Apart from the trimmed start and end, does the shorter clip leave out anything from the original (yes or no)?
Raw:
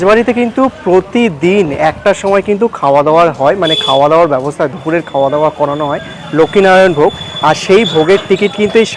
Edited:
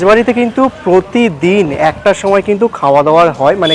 no